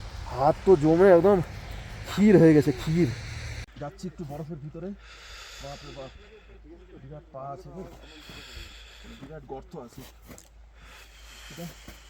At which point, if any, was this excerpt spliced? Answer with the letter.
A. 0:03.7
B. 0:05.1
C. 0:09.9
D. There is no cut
A